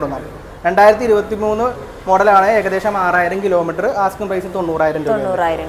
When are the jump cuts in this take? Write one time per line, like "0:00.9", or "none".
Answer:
none

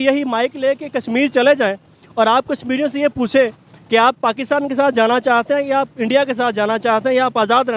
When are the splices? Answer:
none

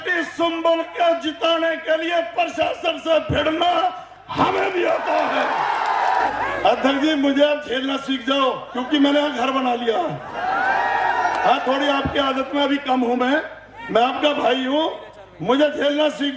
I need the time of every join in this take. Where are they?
0:06.3

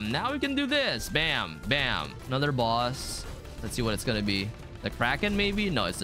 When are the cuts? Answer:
0:02.2

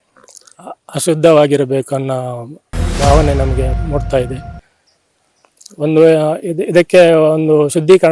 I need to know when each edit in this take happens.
0:03.8

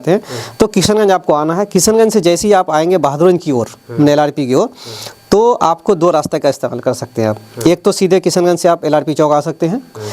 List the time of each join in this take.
none

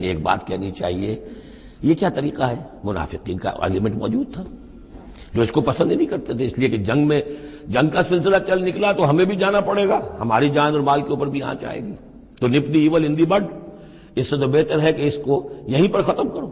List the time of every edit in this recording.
none

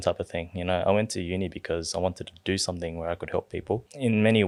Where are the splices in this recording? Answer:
none

